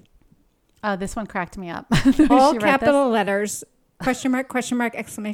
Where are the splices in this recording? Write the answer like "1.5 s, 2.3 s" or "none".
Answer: none